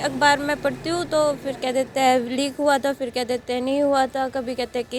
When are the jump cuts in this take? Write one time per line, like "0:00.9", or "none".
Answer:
none